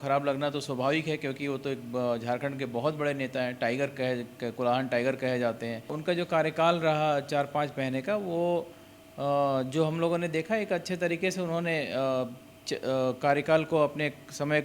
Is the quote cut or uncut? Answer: cut